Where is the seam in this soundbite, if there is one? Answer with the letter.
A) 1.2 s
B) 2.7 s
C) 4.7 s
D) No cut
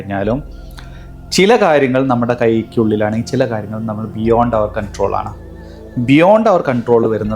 D